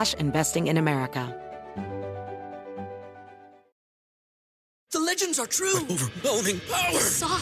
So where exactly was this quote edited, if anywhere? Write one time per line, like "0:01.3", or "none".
0:01.3